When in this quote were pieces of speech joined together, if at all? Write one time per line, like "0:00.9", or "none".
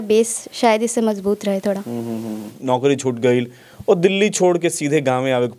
0:02.5